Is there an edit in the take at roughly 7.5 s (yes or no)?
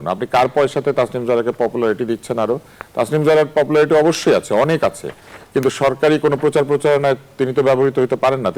no